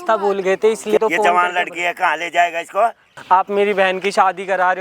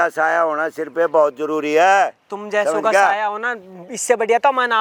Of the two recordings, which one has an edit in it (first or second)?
first